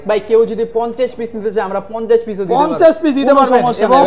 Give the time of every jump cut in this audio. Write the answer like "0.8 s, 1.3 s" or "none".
none